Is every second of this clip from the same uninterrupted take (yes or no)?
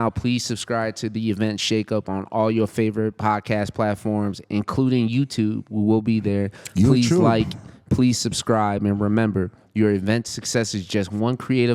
yes